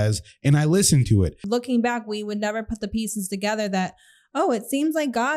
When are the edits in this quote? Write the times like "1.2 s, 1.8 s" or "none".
1.4 s